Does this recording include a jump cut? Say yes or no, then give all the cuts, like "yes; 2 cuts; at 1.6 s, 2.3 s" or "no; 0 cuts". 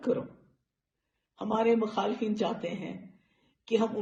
no; 0 cuts